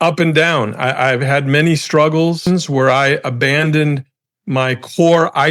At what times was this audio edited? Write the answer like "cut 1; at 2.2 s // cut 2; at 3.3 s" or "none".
cut 1; at 2.7 s

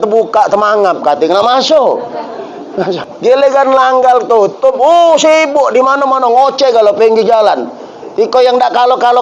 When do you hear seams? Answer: cut 1; at 2.9 s

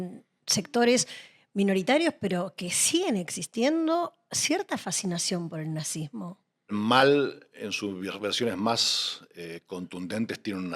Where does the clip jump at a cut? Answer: cut 1; at 6.7 s

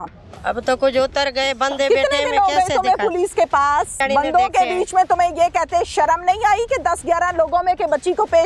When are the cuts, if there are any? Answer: cut 1; at 4.0 s

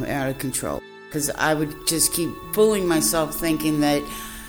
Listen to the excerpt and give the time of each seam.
cut 1; at 1.1 s // cut 2; at 2.4 s

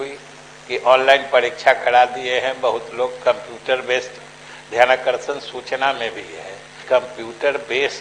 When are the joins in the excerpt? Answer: none

